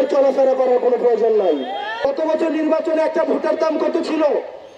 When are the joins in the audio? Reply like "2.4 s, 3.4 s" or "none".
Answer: 2.0 s